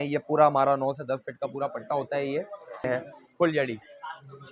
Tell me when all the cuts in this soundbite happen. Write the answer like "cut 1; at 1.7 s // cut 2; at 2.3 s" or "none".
cut 1; at 2.9 s